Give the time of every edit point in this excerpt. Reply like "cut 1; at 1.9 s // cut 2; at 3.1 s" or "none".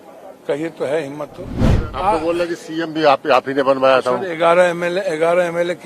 cut 1; at 1.6 s